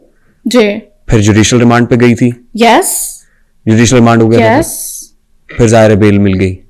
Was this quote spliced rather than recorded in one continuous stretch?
no; 0 cuts

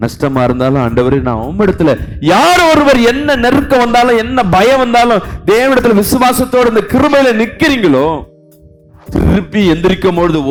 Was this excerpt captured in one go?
yes; 0 cuts

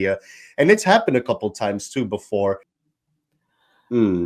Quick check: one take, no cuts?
no; 1 cut; at 2.7 s

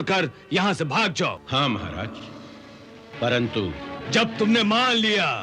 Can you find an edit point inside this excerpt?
yes; 2 cuts; at 1.4 s, 3.1 s

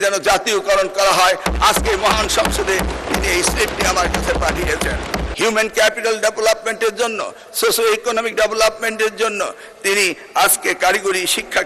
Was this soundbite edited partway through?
yes; 1 cut; at 5.3 s

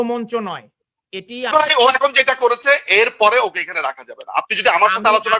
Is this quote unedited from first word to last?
no; 1 cut; at 1.5 s

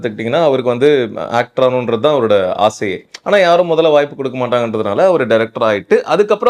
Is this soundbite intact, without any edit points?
yes; 0 cuts

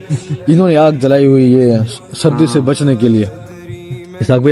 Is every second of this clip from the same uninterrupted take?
yes; 0 cuts

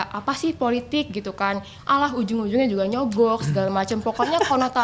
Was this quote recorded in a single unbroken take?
yes; 0 cuts

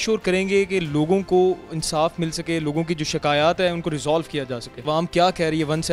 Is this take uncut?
no; 1 cut; at 4.7 s

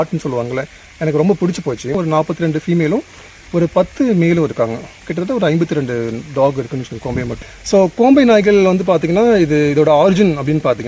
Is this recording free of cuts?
no; 2 cuts; at 2.0 s, 7.3 s

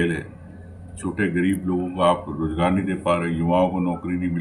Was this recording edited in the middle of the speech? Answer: no; 0 cuts

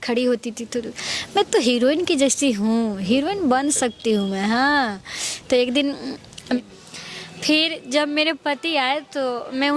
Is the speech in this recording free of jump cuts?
no; 1 cut; at 6.6 s

